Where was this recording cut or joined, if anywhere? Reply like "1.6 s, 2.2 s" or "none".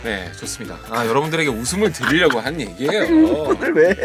none